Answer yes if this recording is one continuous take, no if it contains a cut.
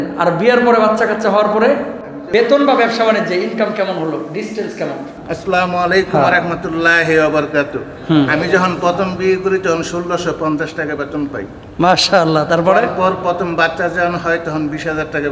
no